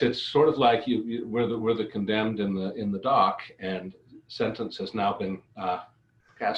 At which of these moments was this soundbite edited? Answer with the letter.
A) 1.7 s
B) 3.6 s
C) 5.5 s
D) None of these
D